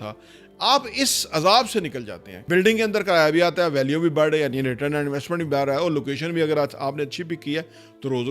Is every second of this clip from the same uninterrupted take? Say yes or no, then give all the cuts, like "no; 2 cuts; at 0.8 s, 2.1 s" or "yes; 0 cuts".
no; 1 cut; at 2.4 s